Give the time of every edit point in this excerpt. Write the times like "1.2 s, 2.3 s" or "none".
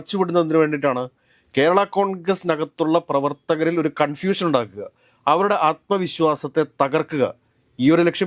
none